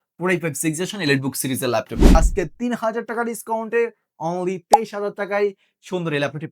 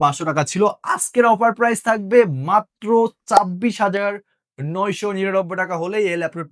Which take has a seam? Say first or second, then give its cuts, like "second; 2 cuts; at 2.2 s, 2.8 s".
first; 1 cut; at 2.1 s